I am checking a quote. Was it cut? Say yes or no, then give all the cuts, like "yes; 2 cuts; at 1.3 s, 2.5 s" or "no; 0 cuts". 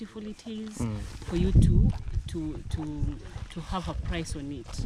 no; 0 cuts